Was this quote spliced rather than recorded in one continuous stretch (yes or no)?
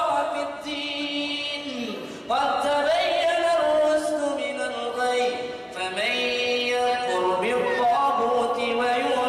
no